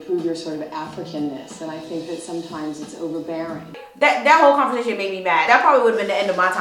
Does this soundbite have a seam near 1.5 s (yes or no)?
no